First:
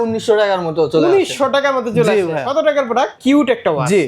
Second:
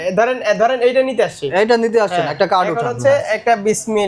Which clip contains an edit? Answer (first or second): first